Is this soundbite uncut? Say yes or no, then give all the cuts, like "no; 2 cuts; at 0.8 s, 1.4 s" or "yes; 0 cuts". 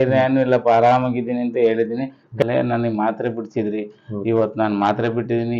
no; 1 cut; at 2.4 s